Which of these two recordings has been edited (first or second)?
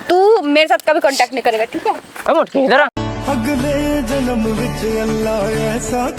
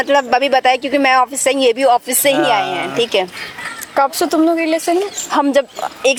first